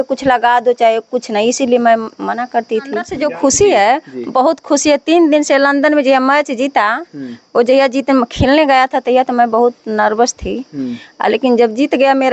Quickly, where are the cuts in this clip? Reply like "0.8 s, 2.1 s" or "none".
3.1 s